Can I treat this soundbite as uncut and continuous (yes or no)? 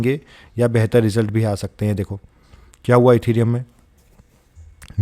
yes